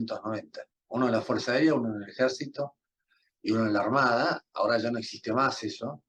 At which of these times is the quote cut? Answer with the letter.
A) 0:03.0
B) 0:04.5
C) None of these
C